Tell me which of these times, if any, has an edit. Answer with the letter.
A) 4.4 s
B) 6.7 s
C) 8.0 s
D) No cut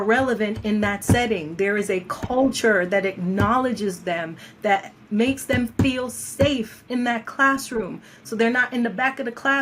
D